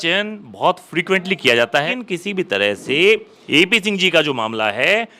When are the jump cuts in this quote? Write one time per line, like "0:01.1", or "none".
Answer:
0:01.9